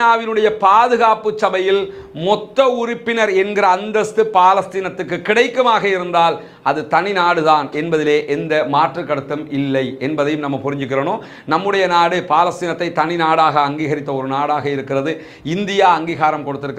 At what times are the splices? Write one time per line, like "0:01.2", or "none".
none